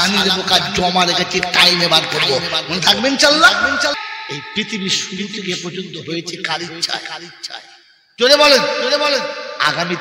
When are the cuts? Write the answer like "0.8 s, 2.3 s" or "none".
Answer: 4.0 s